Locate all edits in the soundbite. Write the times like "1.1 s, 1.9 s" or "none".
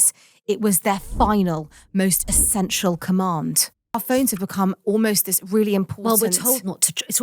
4.0 s